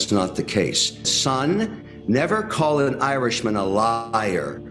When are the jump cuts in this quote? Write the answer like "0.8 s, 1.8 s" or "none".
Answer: 1.1 s